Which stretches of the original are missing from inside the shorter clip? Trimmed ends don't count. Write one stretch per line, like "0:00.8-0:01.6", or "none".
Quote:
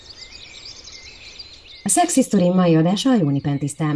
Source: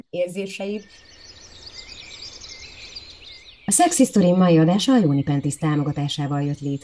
0:03.3-0:03.6